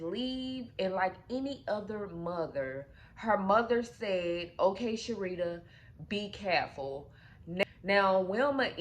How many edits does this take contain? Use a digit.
1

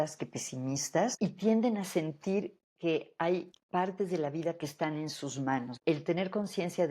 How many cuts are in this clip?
4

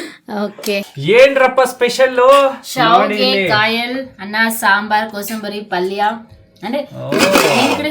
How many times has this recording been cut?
1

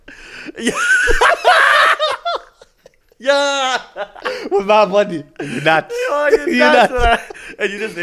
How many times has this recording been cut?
0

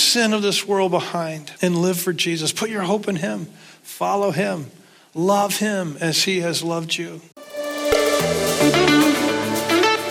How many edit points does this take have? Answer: 2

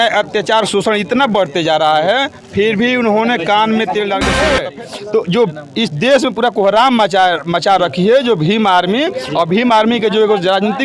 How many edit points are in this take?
1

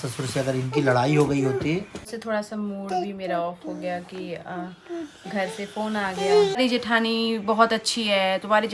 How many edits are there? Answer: 2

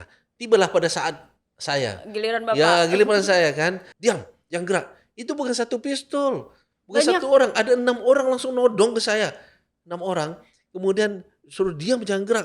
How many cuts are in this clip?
1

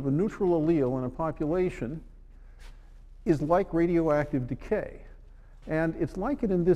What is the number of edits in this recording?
1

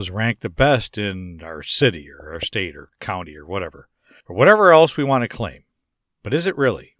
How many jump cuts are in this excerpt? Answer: 0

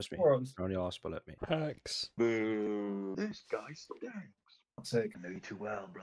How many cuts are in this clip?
2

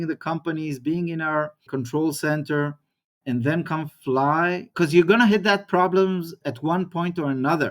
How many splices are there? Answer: 2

